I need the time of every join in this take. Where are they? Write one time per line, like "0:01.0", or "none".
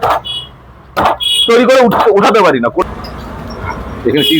0:02.8